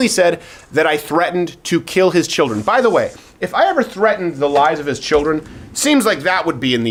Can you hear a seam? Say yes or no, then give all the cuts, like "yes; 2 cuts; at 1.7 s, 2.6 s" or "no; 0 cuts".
no; 0 cuts